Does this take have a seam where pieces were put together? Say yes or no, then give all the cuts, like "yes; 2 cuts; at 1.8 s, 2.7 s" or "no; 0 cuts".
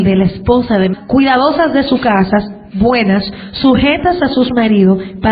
no; 0 cuts